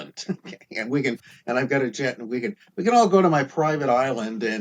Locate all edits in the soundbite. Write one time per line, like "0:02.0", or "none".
none